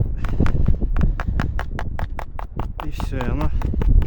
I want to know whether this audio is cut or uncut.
uncut